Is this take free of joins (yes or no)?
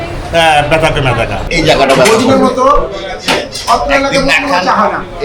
no